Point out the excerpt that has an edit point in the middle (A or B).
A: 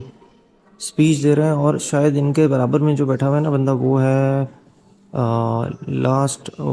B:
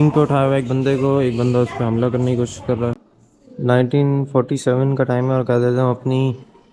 B